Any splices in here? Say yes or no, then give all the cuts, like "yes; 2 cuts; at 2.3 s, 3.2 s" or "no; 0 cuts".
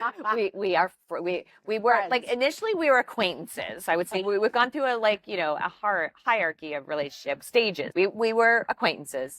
yes; 1 cut; at 7.8 s